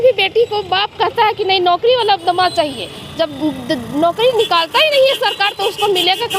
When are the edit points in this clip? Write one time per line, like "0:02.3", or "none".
none